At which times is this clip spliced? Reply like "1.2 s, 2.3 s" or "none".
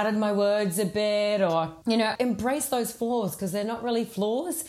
2.1 s